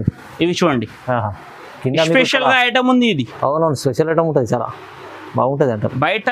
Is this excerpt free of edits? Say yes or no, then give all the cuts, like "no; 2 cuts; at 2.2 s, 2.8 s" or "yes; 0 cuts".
yes; 0 cuts